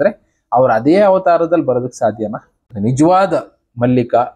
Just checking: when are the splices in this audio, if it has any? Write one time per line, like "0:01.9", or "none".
0:02.6

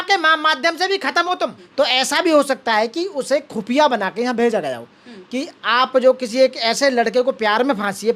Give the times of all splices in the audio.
0:01.6

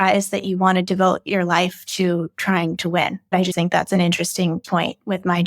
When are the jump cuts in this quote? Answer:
0:03.4
0:04.6

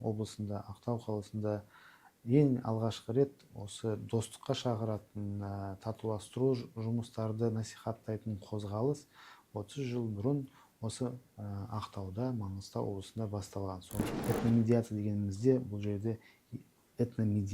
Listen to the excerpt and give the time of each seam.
0:14.0

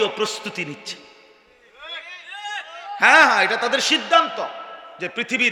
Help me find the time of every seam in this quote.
none

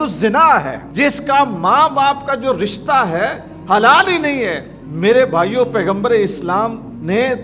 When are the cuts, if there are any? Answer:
none

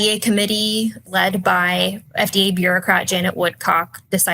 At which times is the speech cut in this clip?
0:01.0
0:02.0

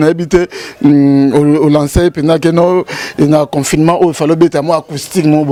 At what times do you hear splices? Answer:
none

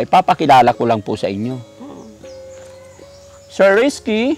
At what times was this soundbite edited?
none

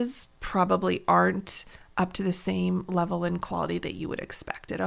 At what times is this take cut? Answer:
none

